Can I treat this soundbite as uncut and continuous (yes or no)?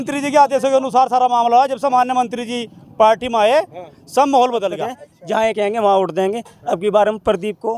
no